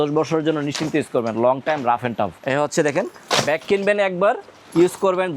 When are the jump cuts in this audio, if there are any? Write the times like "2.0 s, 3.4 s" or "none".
2.4 s